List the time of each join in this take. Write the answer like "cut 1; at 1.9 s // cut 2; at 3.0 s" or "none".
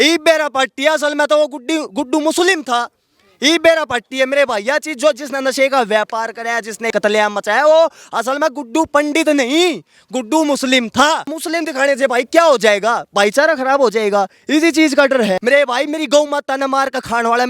cut 1; at 11.4 s // cut 2; at 15.4 s